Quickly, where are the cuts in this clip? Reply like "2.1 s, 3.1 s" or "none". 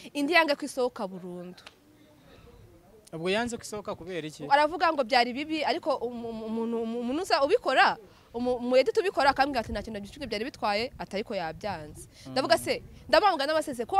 none